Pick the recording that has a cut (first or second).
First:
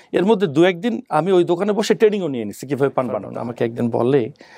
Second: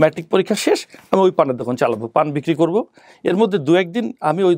first